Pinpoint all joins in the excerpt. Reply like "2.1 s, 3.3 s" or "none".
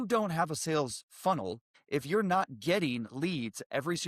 1.7 s